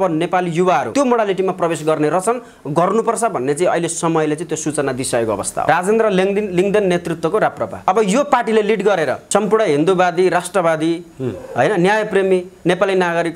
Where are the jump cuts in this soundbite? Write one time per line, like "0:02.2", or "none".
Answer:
0:00.9
0:05.6
0:07.8
0:09.2